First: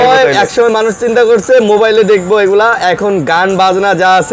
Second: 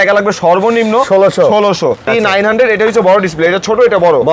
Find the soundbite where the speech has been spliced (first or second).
second